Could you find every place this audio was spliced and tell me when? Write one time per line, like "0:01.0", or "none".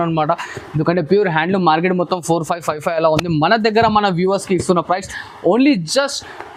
none